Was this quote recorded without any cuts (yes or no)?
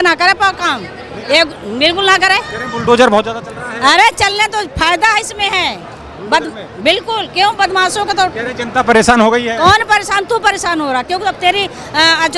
yes